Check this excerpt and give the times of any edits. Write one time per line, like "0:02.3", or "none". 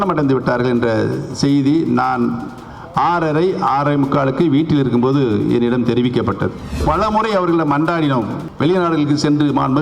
0:06.8
0:08.4